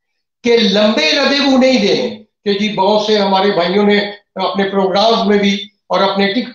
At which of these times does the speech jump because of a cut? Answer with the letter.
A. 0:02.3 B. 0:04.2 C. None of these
A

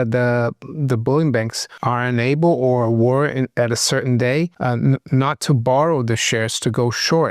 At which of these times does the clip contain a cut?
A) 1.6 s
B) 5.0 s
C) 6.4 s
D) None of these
A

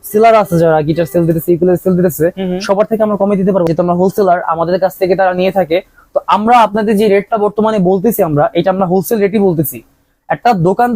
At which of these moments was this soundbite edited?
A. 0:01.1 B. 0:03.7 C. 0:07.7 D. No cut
B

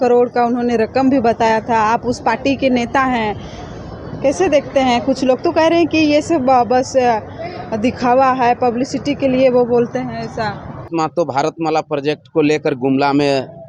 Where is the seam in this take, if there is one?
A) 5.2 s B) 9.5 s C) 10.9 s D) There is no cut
C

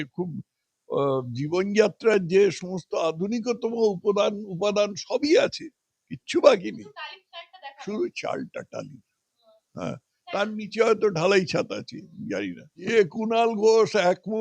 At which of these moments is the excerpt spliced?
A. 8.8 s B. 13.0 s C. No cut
B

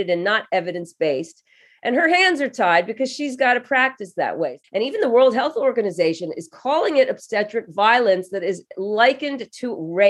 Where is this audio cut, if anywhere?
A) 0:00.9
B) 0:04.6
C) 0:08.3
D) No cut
B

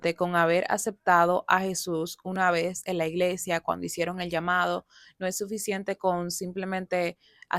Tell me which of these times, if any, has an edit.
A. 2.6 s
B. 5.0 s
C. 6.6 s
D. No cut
D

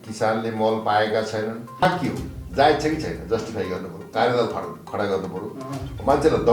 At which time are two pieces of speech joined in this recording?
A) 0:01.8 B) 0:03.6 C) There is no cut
A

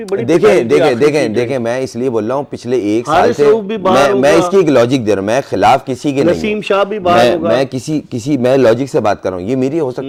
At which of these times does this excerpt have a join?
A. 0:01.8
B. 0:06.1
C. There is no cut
C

